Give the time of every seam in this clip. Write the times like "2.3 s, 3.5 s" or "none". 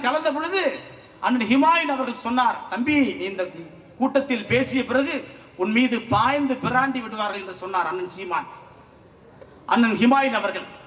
none